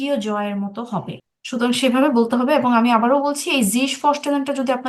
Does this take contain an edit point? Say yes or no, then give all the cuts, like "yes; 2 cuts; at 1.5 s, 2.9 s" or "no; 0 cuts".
yes; 1 cut; at 1.2 s